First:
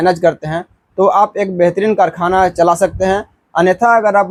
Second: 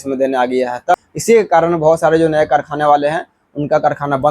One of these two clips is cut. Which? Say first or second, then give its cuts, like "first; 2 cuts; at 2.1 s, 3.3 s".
second; 1 cut; at 0.9 s